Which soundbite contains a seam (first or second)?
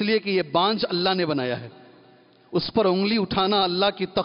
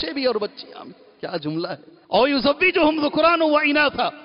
second